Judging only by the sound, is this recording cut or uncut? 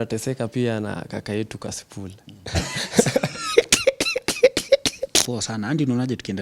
cut